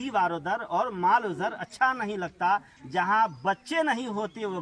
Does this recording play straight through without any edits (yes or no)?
yes